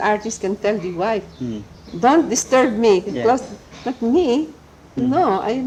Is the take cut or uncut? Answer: uncut